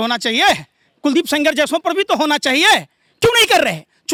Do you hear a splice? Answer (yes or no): no